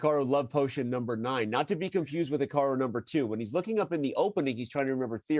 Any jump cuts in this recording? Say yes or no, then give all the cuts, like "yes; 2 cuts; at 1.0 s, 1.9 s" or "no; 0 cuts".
no; 0 cuts